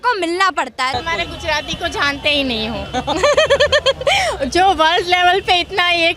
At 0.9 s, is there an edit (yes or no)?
yes